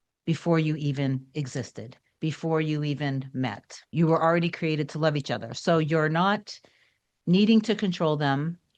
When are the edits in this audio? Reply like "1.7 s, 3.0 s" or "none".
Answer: 3.9 s